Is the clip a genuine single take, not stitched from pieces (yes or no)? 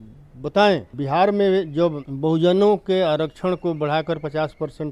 no